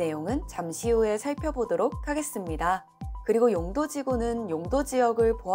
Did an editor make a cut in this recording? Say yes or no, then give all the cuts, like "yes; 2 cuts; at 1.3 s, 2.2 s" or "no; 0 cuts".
no; 0 cuts